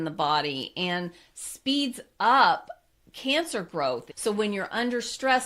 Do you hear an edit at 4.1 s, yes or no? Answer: yes